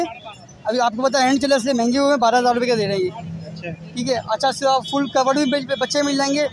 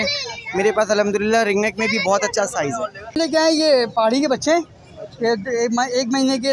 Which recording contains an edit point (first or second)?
second